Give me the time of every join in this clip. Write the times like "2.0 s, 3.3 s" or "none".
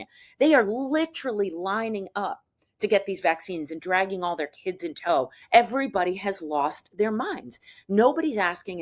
5.4 s